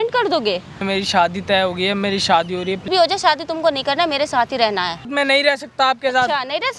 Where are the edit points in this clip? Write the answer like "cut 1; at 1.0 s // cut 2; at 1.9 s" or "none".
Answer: cut 1; at 0.8 s // cut 2; at 2.8 s // cut 3; at 5.1 s